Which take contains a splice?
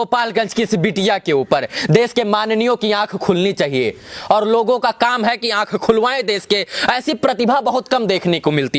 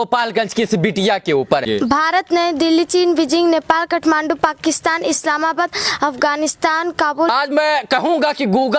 second; 2 cuts; at 1.6 s, 7.3 s

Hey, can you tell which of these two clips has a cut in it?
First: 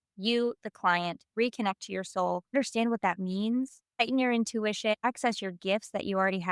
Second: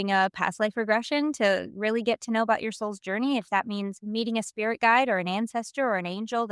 first; 4 cuts; at 1.2 s, 2.5 s, 3.8 s, 5.0 s

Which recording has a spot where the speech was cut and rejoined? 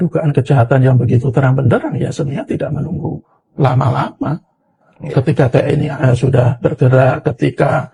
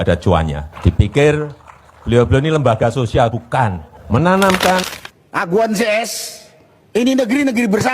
second; 1 cut; at 4.9 s

